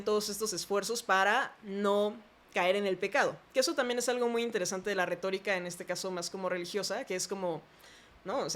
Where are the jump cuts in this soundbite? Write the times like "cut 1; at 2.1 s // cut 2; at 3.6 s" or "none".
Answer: none